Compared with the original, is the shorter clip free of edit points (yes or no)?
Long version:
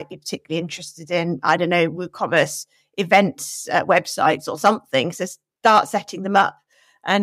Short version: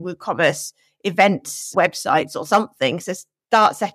no